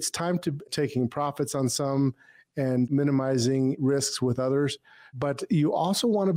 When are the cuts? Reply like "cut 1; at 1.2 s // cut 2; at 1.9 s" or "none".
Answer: cut 1; at 3.8 s

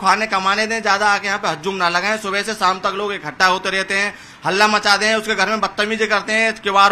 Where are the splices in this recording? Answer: none

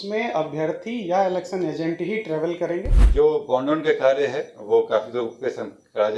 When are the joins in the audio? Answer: cut 1; at 3.0 s

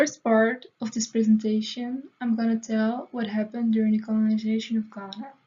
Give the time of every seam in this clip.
none

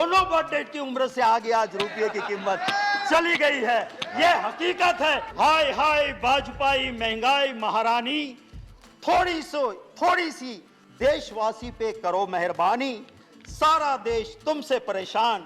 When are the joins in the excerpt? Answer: cut 1; at 5.3 s

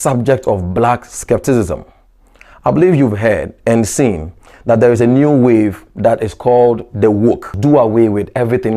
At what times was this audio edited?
cut 1; at 7.5 s

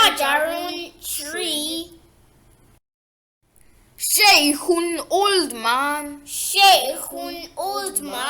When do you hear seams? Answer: cut 1; at 1.8 s

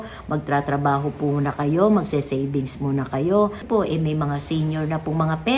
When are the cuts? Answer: cut 1; at 3.6 s

